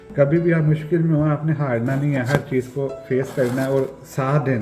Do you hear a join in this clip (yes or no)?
no